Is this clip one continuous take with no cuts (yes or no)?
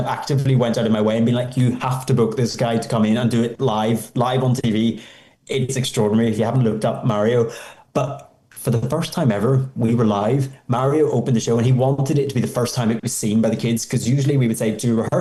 yes